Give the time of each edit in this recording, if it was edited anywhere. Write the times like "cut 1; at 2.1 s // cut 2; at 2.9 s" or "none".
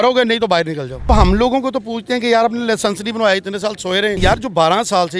cut 1; at 1.1 s // cut 2; at 4.2 s

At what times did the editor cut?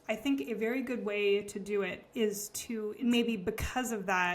cut 1; at 2.9 s

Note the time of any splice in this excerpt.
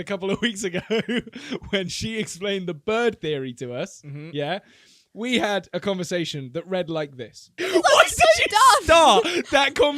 cut 1; at 7.6 s

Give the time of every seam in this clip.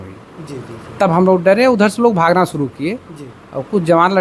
none

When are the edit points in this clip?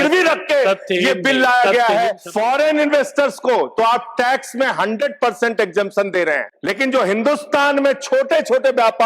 cut 1; at 2.2 s // cut 2; at 6.5 s

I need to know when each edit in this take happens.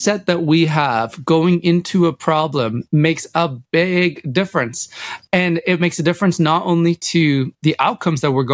cut 1; at 7.5 s

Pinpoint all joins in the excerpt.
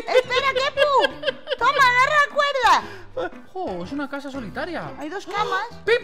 cut 1; at 3.4 s

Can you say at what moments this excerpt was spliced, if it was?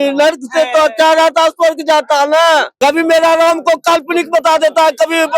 cut 1; at 2.7 s

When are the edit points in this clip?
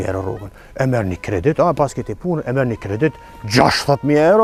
none

